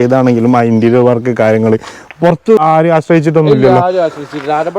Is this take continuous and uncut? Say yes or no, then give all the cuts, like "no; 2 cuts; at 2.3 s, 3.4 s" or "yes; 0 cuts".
no; 1 cut; at 2.6 s